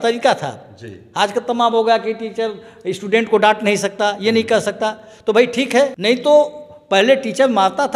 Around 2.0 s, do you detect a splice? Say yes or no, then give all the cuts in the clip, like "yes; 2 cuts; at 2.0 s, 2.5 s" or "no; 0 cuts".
no; 1 cut; at 6.0 s